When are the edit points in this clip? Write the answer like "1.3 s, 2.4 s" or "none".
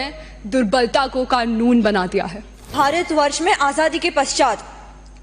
2.7 s